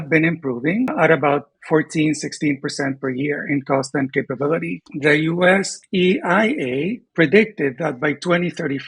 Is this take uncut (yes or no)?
no